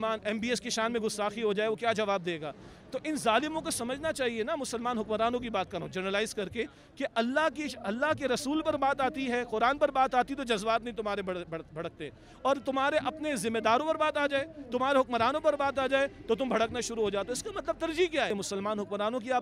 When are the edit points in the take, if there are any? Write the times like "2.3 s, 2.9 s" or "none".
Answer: 18.3 s